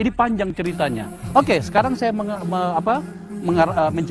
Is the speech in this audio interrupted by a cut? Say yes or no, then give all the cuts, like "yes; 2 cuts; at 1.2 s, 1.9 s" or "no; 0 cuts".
no; 0 cuts